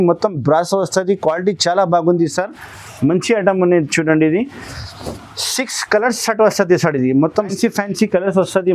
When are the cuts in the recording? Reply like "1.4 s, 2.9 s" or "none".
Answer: 7.5 s